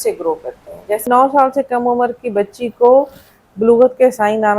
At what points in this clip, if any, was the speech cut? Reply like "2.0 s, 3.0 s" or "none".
1.0 s